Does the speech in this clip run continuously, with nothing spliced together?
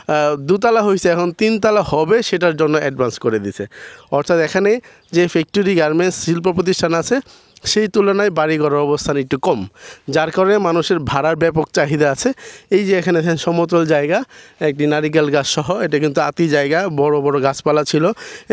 yes; 0 cuts

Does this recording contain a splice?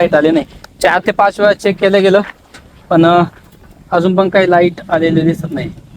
no; 0 cuts

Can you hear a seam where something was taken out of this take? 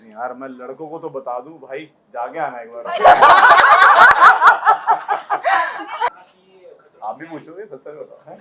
yes; 1 cut; at 6.1 s

